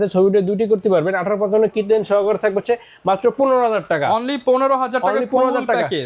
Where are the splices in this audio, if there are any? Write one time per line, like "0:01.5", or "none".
none